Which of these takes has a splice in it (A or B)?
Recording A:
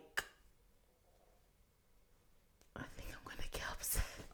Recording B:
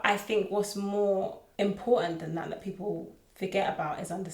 B